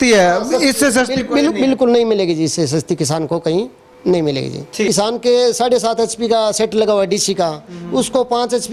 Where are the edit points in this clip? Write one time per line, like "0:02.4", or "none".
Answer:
0:04.9